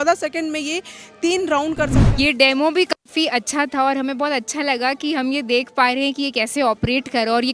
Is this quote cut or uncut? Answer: cut